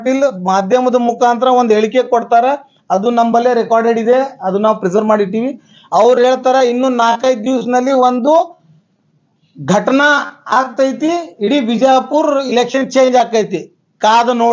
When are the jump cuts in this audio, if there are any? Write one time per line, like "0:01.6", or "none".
none